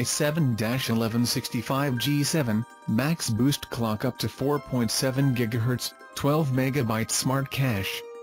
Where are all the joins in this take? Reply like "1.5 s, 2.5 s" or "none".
7.1 s